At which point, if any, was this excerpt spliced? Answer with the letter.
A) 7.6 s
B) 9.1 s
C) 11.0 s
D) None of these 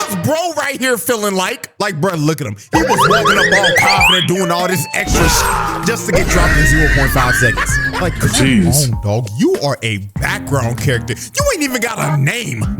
C